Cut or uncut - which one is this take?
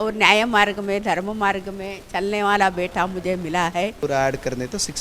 cut